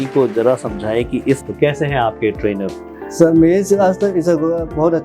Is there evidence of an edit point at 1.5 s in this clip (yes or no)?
yes